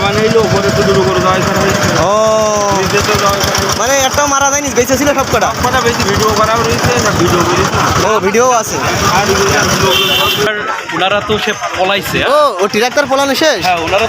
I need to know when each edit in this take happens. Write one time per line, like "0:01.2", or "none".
0:10.5